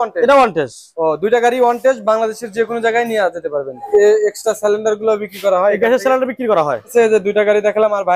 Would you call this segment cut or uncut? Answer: cut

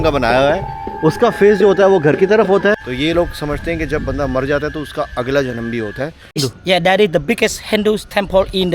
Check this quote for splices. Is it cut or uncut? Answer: cut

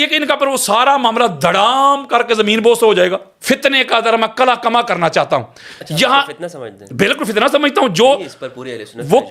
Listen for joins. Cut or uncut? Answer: cut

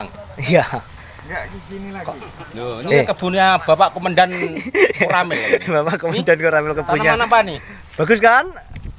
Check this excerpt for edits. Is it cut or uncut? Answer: uncut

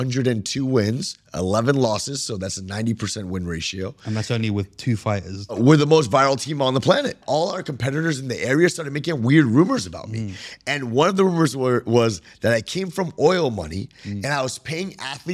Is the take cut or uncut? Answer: cut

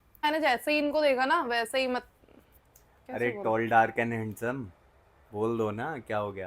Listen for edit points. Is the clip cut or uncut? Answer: uncut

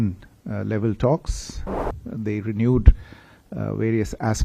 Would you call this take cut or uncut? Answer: cut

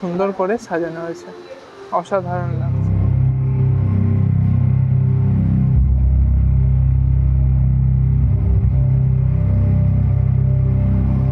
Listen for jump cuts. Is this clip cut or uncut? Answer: uncut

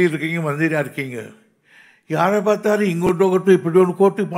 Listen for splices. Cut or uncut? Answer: uncut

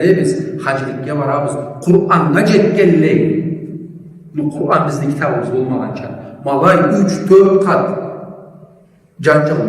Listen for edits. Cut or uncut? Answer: uncut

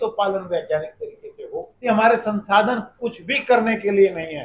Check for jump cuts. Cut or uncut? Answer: cut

